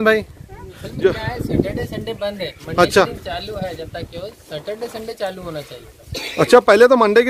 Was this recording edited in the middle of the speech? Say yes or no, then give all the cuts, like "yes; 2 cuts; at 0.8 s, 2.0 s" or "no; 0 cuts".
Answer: no; 0 cuts